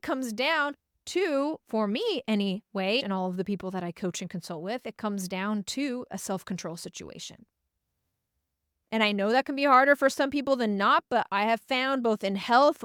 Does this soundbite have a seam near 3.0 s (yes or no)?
no